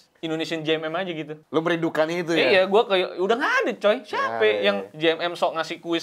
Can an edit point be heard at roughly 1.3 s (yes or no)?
yes